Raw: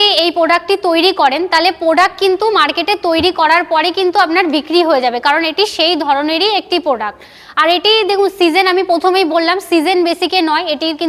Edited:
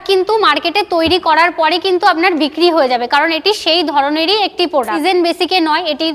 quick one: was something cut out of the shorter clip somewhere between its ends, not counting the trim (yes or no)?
yes